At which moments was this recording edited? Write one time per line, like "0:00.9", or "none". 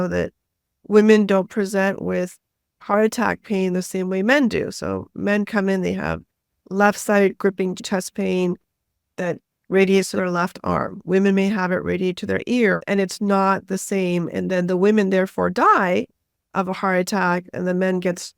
0:07.8
0:12.8